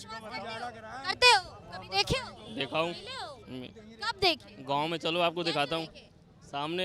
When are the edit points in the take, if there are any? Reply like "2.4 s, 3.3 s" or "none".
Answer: none